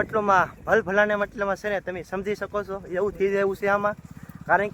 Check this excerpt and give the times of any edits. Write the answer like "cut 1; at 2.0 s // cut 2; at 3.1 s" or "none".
none

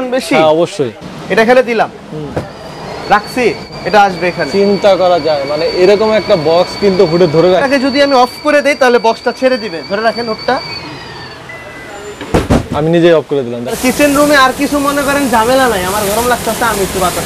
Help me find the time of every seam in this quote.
cut 1; at 1.0 s // cut 2; at 3.6 s // cut 3; at 7.6 s // cut 4; at 13.8 s

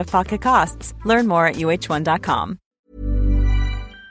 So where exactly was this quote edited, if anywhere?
cut 1; at 2.6 s

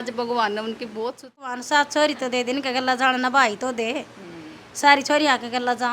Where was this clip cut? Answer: cut 1; at 1.6 s

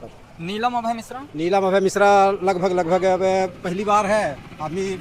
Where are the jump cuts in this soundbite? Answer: none

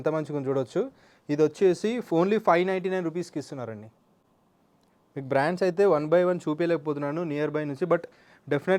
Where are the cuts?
none

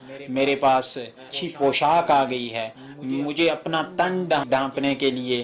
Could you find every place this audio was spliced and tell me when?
cut 1; at 1.3 s // cut 2; at 4.4 s

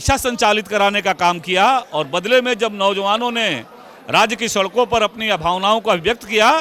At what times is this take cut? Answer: none

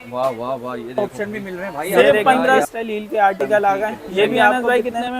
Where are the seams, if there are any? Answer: cut 1; at 2.7 s // cut 2; at 4.5 s

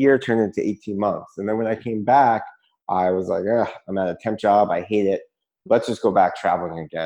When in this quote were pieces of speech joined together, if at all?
none

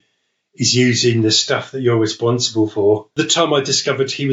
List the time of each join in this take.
cut 1; at 3.1 s

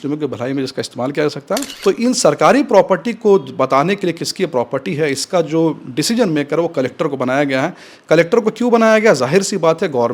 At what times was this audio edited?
cut 1; at 1.7 s

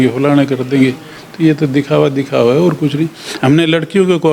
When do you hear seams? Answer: cut 1; at 3.2 s

